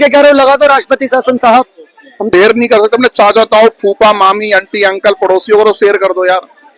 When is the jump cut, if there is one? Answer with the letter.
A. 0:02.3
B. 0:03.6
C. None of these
A